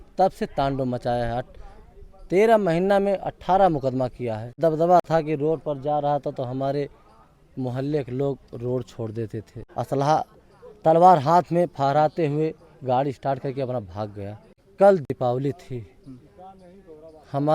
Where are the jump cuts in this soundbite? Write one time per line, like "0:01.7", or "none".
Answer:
0:04.6
0:09.6
0:14.7